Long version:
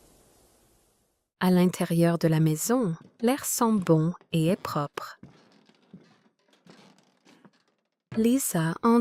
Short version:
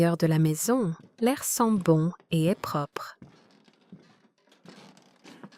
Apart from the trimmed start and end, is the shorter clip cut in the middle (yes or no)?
no